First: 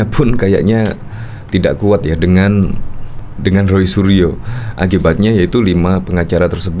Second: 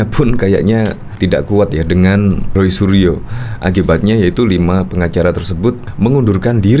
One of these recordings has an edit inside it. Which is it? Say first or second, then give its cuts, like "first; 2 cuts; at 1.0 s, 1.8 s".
second; 3 cuts; at 1.0 s, 2.5 s, 5.9 s